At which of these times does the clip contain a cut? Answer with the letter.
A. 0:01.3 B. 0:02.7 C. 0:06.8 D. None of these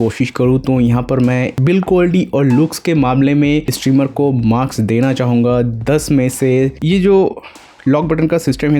C